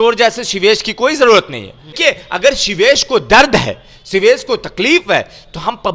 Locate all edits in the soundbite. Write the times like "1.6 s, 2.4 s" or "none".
2.0 s